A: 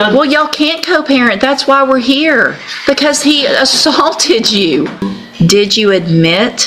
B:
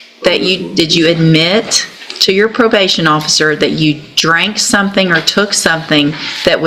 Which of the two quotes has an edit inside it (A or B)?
A